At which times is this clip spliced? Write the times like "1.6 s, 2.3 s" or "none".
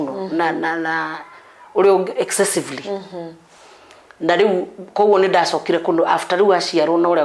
none